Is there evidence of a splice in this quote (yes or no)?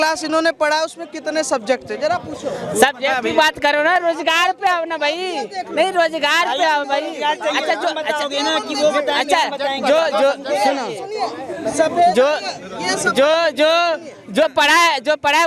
no